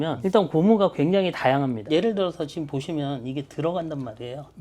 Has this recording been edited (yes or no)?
yes